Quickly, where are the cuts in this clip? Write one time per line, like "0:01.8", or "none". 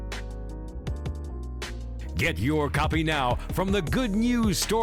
none

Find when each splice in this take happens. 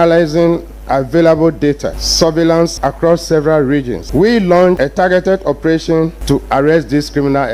0:02.0
0:02.8
0:04.0
0:04.8
0:06.2

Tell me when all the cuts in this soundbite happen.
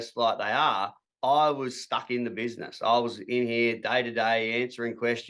none

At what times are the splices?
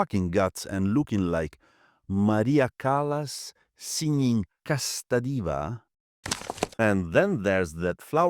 0:06.3

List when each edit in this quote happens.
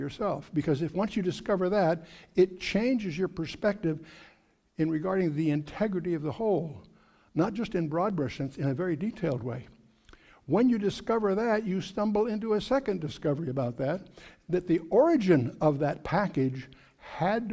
0:07.2

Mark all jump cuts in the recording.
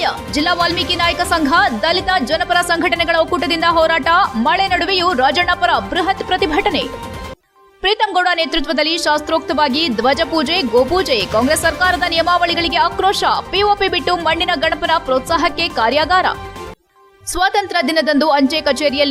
none

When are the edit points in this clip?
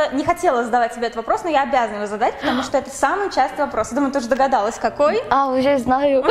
none

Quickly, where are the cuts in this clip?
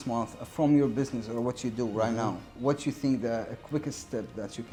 none

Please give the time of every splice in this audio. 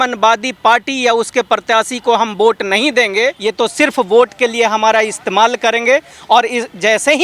0:03.4

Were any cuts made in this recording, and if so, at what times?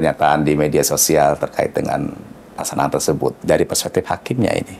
0:03.5

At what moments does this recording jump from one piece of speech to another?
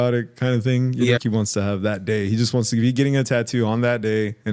0:01.2

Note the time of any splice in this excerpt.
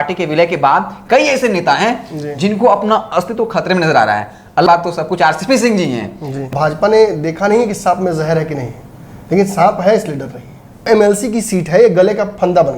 0:04.7
0:06.5
0:10.8

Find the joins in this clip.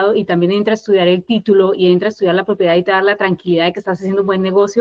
none

